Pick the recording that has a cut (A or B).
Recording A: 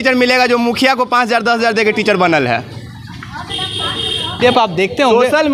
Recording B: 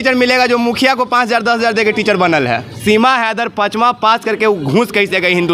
B